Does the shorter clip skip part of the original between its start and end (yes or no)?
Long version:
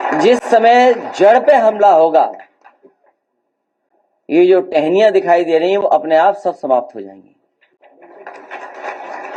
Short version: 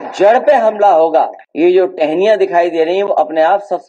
yes